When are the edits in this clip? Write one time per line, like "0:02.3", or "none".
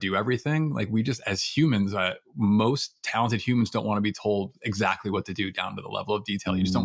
none